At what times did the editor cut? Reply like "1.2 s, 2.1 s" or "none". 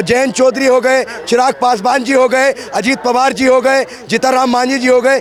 none

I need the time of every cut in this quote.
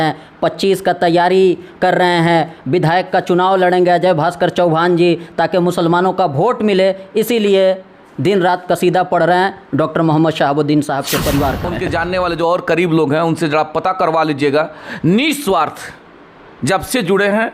11.7 s

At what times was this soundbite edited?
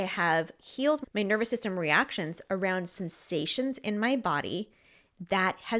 1.0 s

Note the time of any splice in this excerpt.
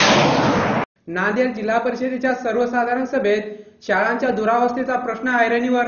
0.9 s

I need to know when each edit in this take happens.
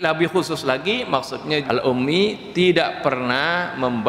1.6 s

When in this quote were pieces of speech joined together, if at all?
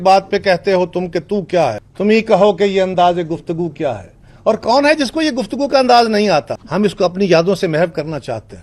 none

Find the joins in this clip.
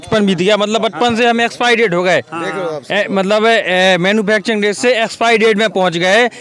none

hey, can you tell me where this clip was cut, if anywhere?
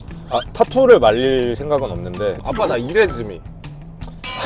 2.4 s

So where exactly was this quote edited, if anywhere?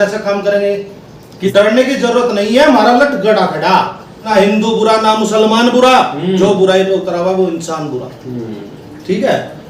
1.4 s, 4.3 s

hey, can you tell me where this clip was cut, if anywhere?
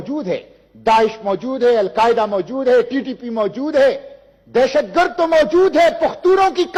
none

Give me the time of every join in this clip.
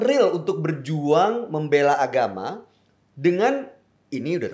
none

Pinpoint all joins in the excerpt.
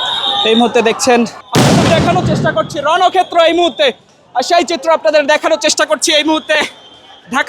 1.4 s

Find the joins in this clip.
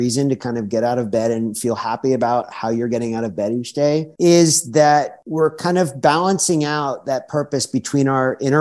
4.1 s, 5.2 s

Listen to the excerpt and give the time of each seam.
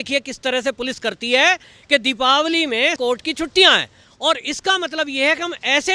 2.9 s

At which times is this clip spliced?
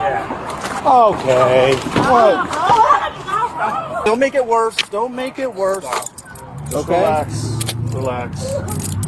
4.0 s

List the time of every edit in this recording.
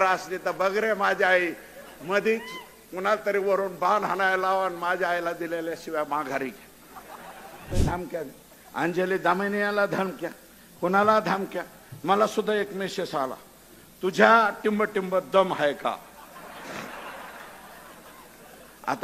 7.8 s

